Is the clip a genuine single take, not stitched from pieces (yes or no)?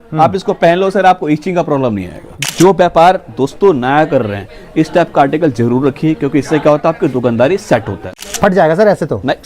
no